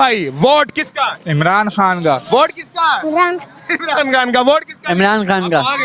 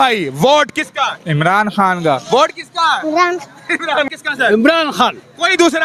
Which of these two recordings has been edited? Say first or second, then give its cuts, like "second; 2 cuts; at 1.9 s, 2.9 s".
second; 1 cut; at 4.1 s